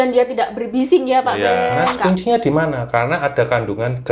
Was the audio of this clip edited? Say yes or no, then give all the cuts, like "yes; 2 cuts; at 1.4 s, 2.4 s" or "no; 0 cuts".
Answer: yes; 1 cut; at 2.0 s